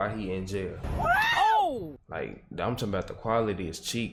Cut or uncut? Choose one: uncut